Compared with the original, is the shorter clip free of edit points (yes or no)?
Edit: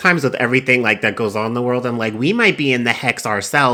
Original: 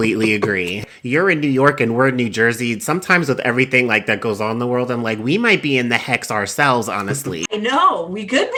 yes